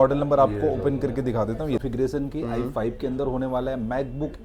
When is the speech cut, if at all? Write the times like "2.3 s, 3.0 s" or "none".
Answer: 1.8 s